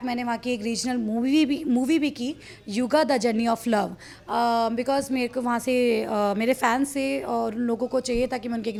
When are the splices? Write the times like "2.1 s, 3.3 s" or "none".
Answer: none